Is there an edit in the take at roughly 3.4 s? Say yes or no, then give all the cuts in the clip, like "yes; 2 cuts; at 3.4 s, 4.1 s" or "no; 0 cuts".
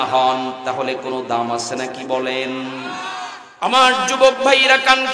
yes; 1 cut; at 3.4 s